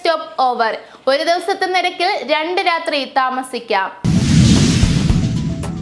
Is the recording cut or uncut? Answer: cut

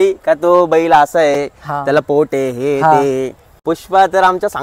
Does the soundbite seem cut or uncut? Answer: cut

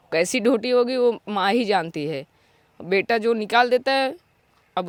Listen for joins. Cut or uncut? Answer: uncut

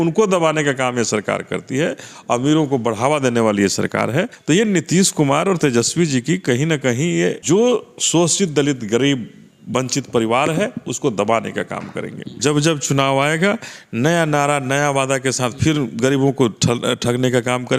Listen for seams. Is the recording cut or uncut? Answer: cut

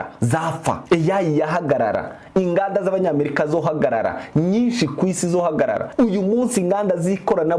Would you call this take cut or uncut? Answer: cut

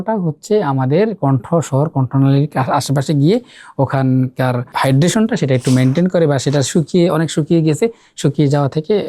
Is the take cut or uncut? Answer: cut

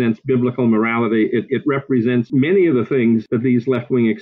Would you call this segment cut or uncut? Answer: cut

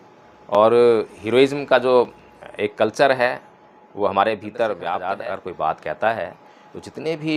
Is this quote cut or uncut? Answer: cut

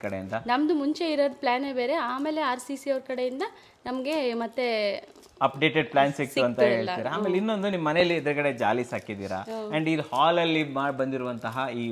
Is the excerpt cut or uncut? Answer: uncut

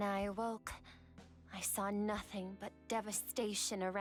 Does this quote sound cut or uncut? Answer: uncut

